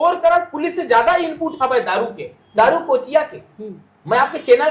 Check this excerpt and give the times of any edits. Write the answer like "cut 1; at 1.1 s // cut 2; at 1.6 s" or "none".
none